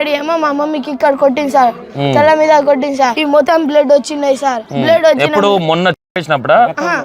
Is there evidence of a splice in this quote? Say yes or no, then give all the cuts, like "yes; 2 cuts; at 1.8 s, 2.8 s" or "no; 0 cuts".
yes; 2 cuts; at 3.4 s, 4.7 s